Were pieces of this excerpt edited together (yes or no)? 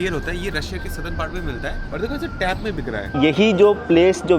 yes